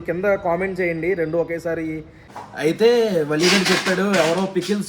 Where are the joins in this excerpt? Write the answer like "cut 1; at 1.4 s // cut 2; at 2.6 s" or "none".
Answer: cut 1; at 2.3 s